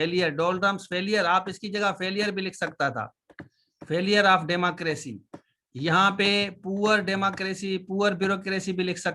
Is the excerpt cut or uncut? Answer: uncut